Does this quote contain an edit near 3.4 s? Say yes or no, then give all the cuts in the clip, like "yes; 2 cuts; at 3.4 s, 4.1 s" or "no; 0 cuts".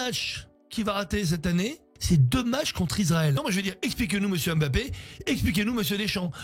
yes; 2 cuts; at 1.9 s, 3.4 s